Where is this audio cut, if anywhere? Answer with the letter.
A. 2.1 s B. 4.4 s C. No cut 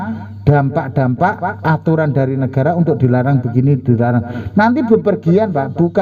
C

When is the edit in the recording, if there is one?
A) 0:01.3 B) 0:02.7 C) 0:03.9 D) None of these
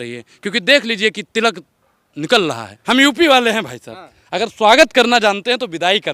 B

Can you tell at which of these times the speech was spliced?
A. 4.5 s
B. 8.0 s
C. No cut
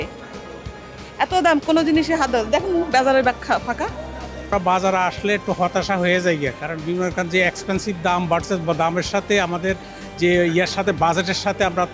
A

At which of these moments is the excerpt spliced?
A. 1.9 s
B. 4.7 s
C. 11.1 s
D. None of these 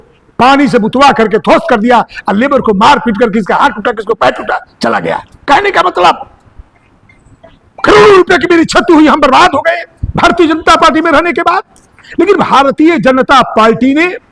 D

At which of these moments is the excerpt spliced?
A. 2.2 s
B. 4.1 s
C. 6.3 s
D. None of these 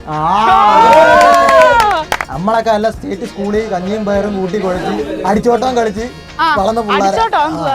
A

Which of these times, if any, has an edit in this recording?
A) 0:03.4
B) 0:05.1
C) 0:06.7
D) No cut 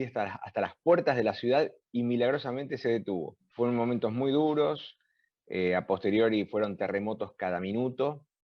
A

